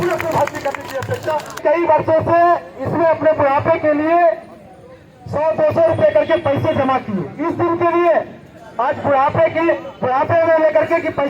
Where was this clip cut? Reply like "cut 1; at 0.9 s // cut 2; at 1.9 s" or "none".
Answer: cut 1; at 1.6 s